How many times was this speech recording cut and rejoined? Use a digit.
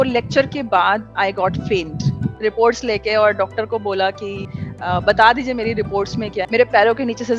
2